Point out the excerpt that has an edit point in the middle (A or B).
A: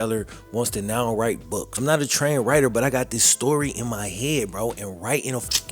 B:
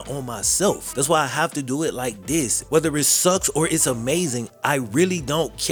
A